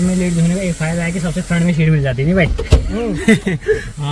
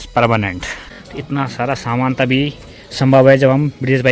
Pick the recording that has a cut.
second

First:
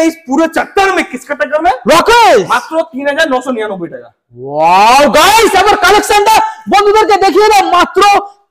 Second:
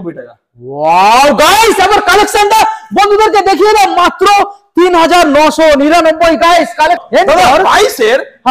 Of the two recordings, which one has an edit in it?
second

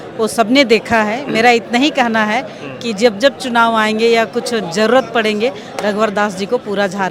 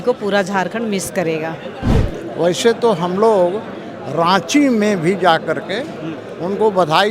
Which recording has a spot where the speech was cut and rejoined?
second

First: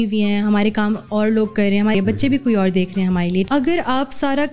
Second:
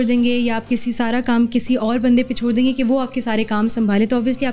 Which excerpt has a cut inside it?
first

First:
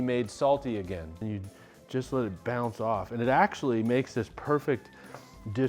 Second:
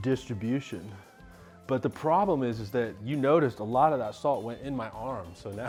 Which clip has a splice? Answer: first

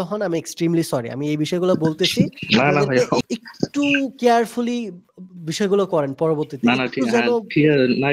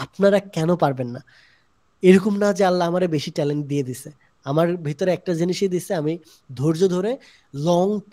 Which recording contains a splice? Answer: first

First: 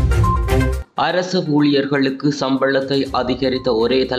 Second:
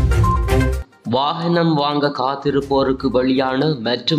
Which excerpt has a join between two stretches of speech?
second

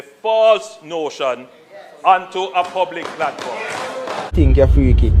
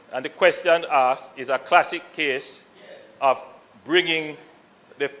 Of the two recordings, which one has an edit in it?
first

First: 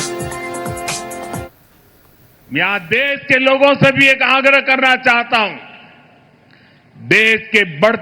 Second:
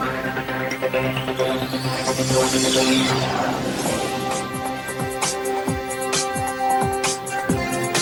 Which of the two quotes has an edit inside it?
first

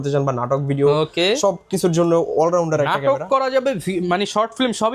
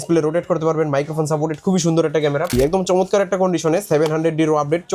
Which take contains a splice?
second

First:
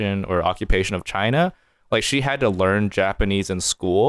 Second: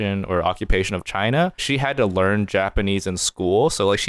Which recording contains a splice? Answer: second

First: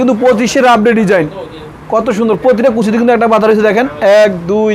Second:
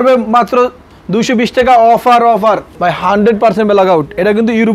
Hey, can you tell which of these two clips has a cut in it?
second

